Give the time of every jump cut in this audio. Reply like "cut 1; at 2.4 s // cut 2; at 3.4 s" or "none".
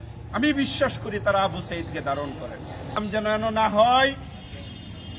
cut 1; at 3.0 s